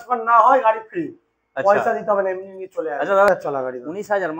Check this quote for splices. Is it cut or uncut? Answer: cut